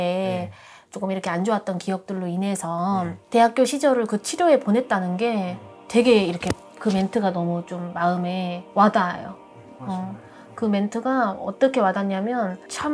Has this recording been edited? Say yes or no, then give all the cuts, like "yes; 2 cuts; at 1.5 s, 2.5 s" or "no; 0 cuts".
no; 0 cuts